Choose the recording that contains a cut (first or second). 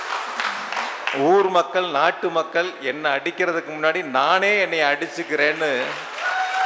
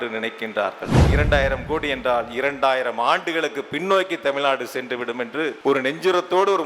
second